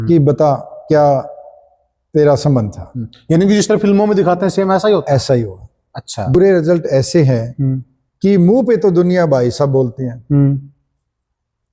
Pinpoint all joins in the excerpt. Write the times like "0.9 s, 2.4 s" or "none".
6.3 s